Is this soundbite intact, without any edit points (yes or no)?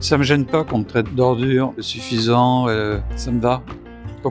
no